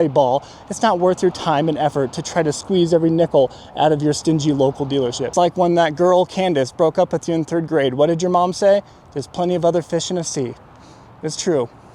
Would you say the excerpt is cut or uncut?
cut